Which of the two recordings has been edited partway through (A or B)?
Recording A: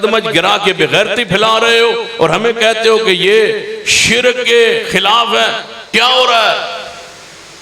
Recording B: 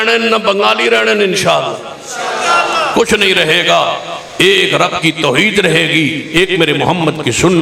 A